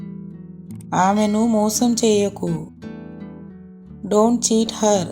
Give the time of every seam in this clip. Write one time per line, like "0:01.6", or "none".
0:00.9
0:02.7
0:04.0